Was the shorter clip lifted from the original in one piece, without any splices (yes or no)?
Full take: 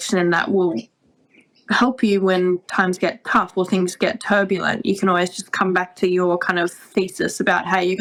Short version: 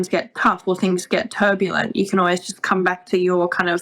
yes